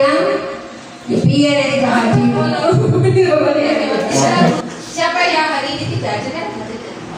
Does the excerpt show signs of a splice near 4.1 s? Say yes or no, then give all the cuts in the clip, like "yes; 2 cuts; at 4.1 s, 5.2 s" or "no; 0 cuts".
yes; 1 cut; at 4.1 s